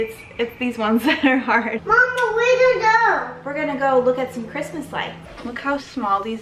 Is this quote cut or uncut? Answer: cut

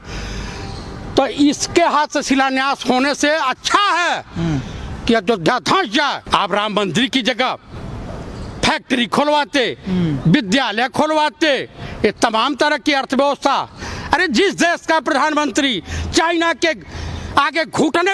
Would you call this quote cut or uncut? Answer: cut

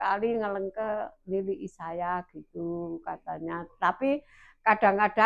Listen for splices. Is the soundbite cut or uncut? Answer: uncut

